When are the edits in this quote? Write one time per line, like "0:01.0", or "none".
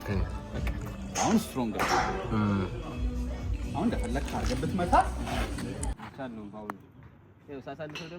0:06.0